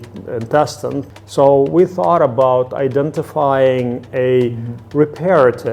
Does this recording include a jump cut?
yes; 2 cuts; at 1.1 s, 4.8 s

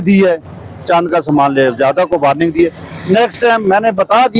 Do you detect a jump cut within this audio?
no; 0 cuts

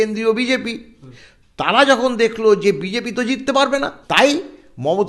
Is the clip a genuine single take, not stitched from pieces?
no; 2 cuts; at 1.0 s, 4.0 s

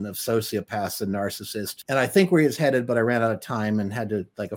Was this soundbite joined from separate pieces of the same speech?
yes; 1 cut; at 1.7 s

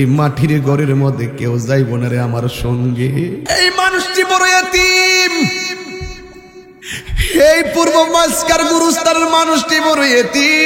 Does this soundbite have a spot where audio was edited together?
yes; 1 cut; at 3.4 s

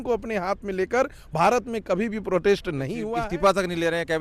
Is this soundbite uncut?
no; 1 cut; at 3.0 s

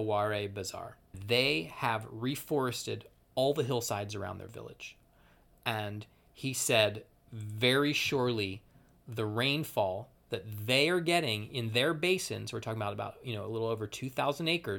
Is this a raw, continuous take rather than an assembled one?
no; 1 cut; at 1.2 s

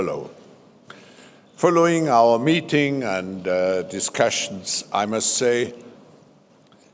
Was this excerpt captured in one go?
no; 1 cut; at 5.5 s

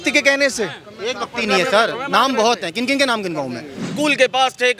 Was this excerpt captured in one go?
no; 1 cut; at 3.8 s

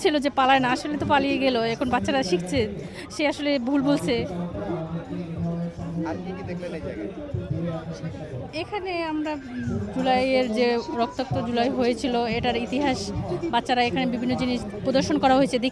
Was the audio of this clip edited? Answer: no; 0 cuts

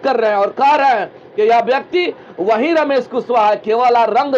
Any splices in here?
no; 0 cuts

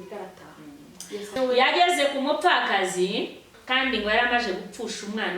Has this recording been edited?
yes; 2 cuts; at 1.4 s, 3.6 s

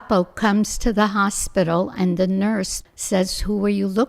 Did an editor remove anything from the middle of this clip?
yes; 1 cut; at 2.8 s

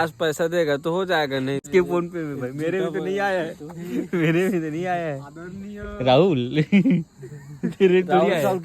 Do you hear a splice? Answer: yes; 1 cut; at 1.7 s

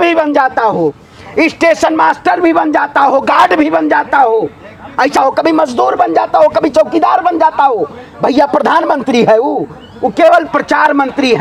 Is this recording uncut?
yes; 0 cuts

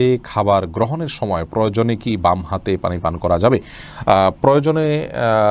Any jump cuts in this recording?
no; 0 cuts

